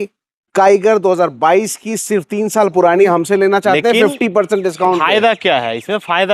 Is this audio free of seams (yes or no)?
no